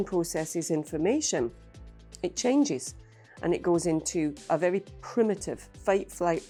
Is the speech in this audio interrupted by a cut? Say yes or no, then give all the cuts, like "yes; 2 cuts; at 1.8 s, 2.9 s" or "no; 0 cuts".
no; 0 cuts